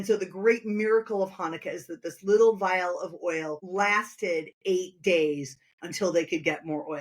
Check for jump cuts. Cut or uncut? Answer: cut